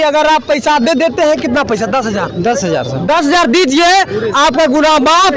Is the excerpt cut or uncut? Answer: uncut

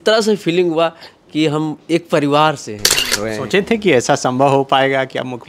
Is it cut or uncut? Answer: cut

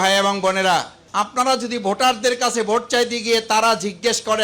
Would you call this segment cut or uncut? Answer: cut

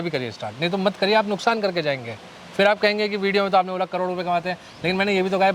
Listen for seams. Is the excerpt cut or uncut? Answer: uncut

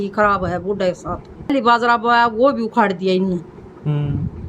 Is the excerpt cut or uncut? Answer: cut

